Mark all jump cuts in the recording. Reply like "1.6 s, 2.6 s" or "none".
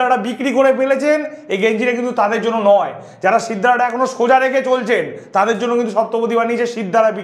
none